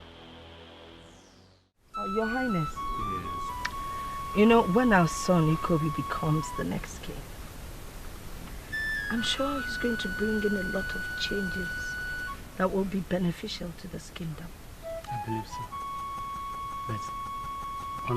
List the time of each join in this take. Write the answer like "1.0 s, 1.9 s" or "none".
1.7 s